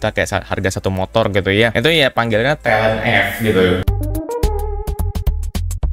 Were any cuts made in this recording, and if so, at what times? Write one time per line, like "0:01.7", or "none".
none